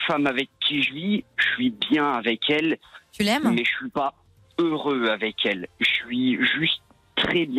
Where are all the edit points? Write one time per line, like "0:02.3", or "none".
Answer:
none